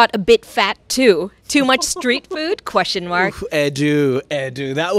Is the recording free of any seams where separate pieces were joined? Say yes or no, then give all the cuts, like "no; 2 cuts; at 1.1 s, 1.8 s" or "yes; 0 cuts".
yes; 0 cuts